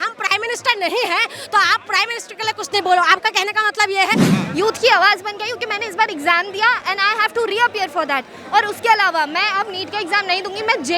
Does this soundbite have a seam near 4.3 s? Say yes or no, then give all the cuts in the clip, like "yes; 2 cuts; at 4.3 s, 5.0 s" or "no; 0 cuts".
yes; 1 cut; at 4.3 s